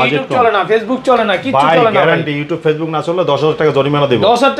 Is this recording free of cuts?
yes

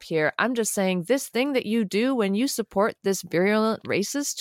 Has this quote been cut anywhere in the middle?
no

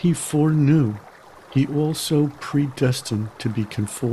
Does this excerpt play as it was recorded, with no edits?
yes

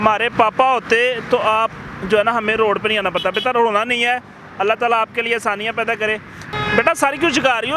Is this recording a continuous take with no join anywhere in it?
no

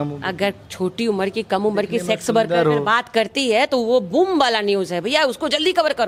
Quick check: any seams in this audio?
no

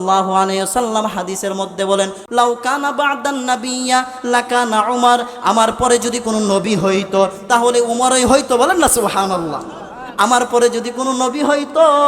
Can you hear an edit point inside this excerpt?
yes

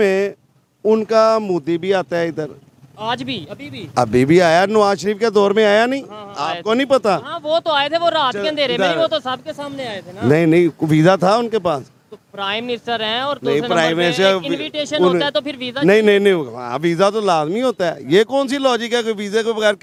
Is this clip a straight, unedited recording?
yes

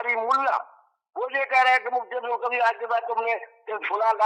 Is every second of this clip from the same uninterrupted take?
yes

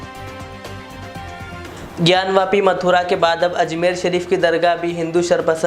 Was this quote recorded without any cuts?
no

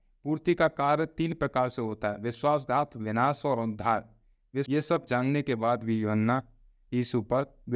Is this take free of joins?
no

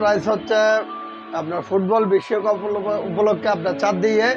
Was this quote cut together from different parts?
no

